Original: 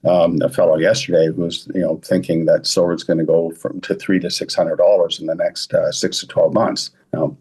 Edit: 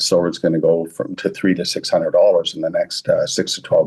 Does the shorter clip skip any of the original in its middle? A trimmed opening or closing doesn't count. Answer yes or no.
no